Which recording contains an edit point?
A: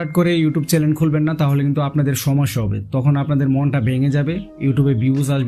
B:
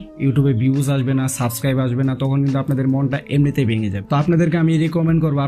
B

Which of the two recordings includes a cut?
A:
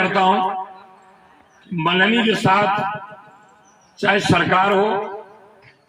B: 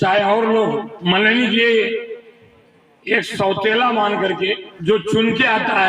B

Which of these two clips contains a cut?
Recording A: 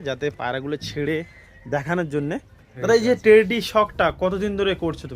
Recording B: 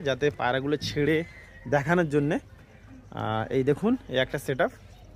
A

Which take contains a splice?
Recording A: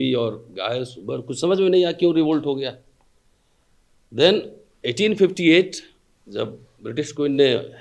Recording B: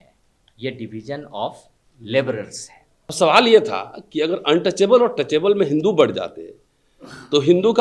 B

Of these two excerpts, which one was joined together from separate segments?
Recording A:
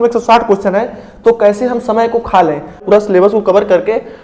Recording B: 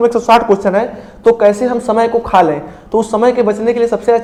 A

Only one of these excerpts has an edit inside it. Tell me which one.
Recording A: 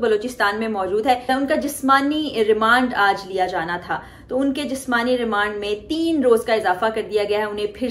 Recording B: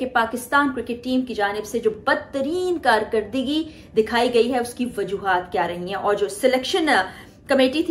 A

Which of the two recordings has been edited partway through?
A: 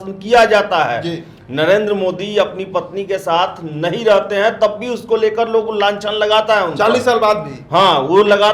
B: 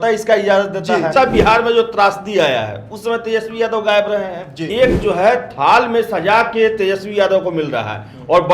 B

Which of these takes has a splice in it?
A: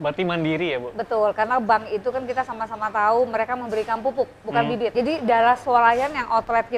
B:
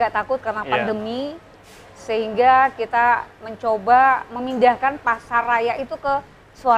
A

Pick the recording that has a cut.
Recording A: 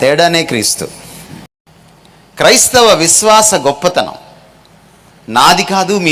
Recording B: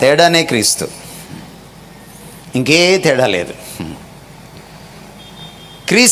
A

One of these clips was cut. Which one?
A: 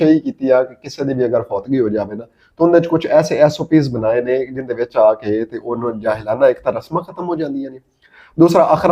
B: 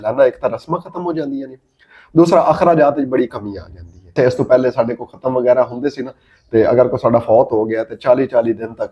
B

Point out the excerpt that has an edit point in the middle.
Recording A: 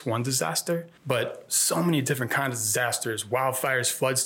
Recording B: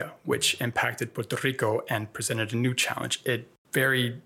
A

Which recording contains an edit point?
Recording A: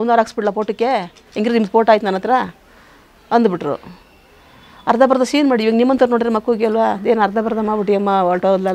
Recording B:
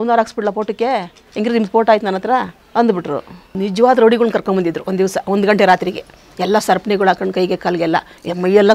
B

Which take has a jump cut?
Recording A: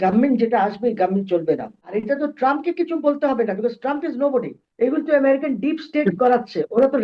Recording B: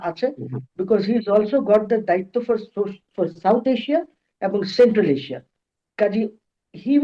A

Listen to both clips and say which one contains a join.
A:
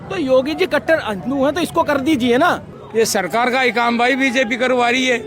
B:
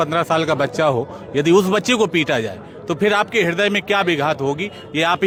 A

